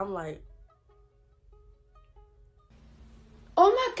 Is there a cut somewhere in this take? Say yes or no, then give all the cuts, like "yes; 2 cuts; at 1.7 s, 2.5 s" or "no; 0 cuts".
no; 0 cuts